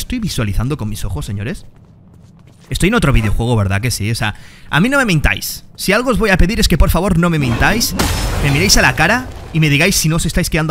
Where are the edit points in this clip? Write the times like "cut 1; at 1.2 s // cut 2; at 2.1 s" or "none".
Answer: none